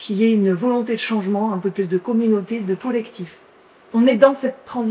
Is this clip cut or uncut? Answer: uncut